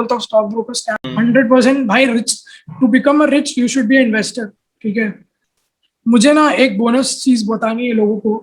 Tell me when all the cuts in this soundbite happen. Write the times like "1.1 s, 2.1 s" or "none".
1.0 s, 5.3 s